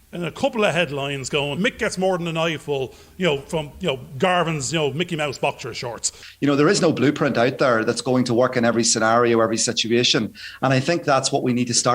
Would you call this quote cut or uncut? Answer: cut